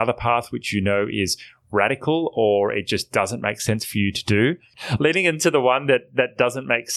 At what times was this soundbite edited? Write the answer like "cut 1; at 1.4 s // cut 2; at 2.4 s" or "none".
cut 1; at 4.8 s